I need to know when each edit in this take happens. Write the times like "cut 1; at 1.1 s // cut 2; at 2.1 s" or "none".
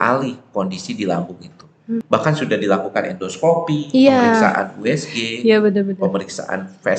cut 1; at 2.0 s